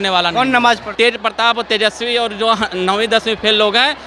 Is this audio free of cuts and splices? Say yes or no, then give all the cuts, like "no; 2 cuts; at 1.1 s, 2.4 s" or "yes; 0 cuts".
no; 1 cut; at 0.9 s